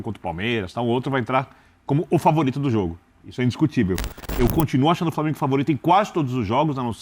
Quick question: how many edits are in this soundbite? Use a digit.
1